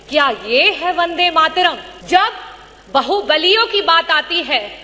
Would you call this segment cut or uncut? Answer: cut